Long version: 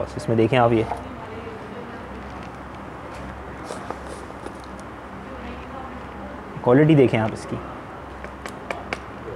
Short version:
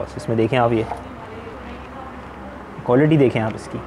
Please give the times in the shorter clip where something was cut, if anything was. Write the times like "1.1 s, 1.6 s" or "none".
1.5 s

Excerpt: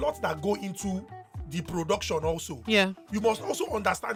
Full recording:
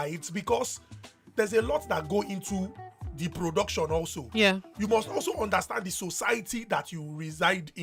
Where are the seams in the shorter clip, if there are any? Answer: none

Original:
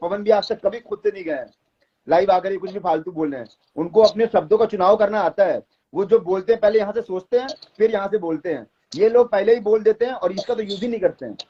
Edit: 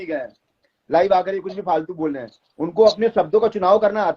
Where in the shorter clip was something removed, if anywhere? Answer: none

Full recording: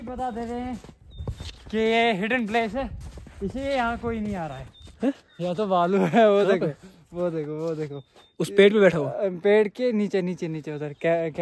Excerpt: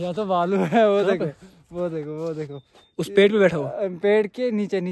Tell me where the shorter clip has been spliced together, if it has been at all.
none

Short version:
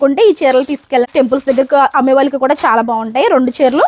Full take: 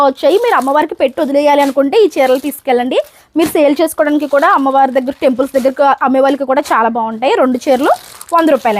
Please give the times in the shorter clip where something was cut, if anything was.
1.1 s

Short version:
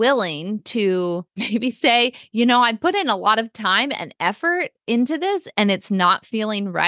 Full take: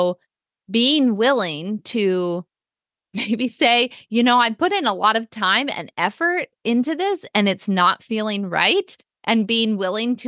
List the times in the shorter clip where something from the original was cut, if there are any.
1.3 s

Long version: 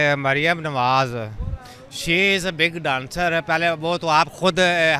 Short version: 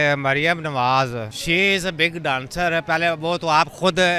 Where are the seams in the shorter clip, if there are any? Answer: 1.3 s

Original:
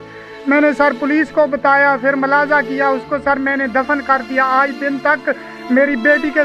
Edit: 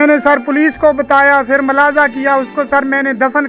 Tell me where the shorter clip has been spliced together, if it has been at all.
none

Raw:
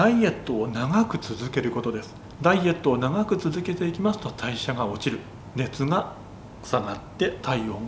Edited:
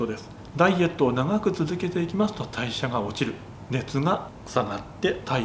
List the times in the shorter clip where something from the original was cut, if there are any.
4.3 s

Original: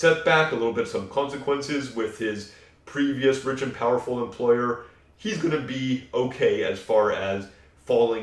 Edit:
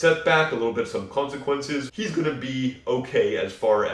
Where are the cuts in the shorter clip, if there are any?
1.9 s

